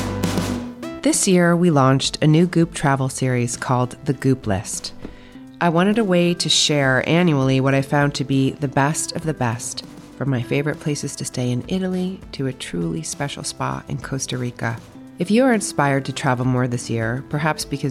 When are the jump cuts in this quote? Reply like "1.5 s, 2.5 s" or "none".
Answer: 0.9 s

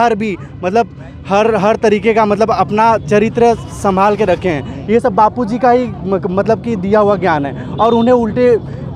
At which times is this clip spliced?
none

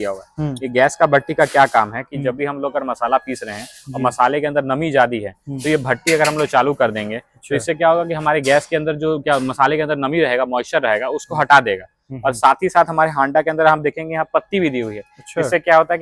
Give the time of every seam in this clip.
none

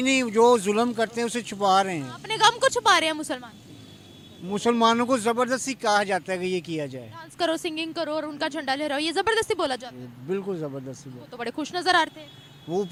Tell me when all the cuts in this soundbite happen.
none

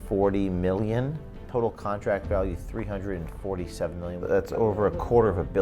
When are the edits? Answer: 1.4 s, 4.2 s

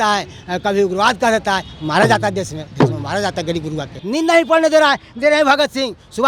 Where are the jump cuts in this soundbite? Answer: 3.9 s

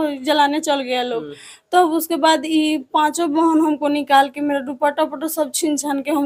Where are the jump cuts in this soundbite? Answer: none

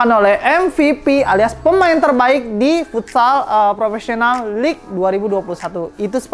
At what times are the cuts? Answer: none

